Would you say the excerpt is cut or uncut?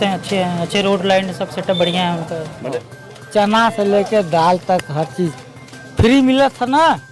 cut